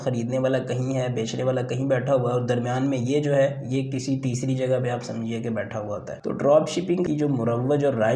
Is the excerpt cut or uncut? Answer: cut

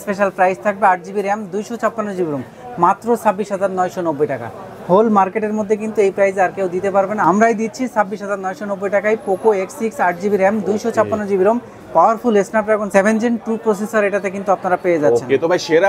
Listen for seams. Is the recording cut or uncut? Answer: uncut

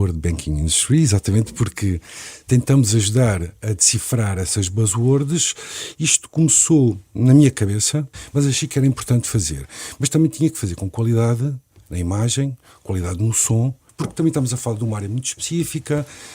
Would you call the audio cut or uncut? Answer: cut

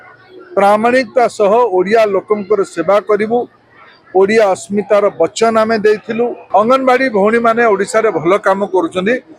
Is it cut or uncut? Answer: cut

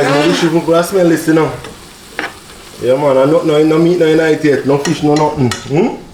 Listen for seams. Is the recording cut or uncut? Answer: uncut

